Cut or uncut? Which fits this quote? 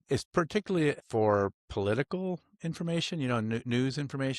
cut